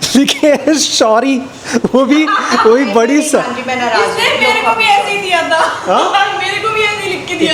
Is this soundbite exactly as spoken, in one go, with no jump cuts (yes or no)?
yes